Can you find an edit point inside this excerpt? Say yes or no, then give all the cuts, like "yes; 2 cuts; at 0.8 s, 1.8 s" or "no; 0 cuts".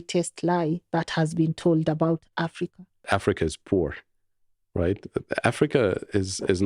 yes; 1 cut; at 3.0 s